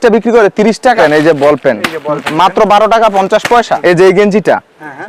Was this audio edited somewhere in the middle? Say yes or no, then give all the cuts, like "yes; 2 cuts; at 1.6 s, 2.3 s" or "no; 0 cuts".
yes; 2 cuts; at 1.0 s, 3.7 s